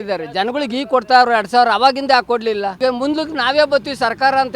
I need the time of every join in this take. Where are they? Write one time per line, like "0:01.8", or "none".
0:02.8